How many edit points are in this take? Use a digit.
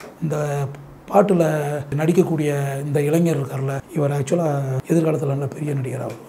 3